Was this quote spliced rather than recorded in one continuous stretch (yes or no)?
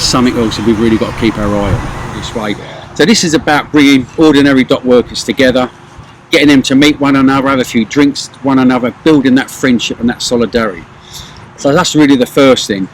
yes